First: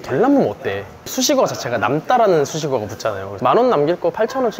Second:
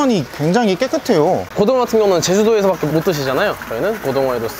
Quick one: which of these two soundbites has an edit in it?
first; 2 cuts; at 1.1 s, 3.2 s

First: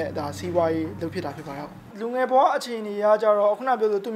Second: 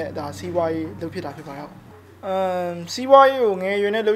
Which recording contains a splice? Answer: first; 1 cut; at 1.9 s

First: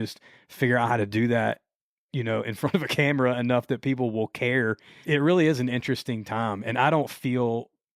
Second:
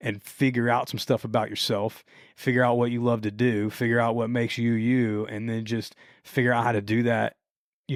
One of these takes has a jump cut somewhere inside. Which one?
first; 1 cut; at 5.0 s

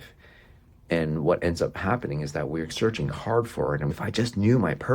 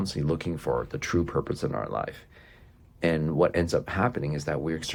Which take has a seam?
first; 1 cut; at 3.9 s

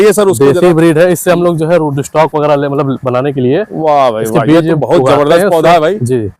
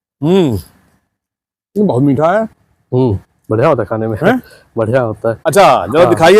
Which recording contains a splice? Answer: second; 1 cut; at 5.4 s

